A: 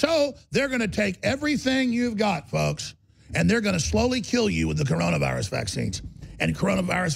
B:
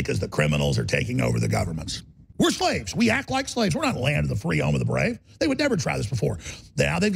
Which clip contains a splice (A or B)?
B